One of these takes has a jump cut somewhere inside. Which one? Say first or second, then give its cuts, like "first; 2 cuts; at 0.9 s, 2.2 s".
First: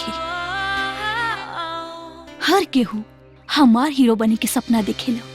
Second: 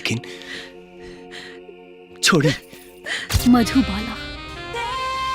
second; 1 cut; at 3.2 s